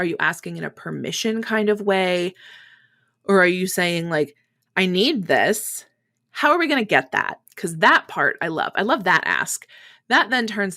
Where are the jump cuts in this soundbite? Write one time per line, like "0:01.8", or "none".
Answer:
none